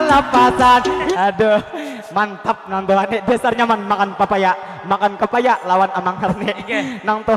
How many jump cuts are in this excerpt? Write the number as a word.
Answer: one